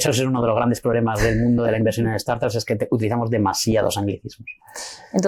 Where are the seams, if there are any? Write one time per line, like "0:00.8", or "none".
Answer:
none